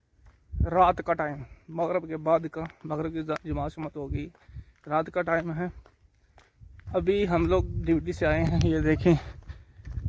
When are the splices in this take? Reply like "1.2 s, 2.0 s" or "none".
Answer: none